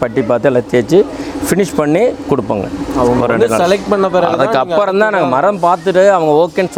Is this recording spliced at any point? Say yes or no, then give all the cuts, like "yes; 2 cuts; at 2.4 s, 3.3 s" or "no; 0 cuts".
no; 0 cuts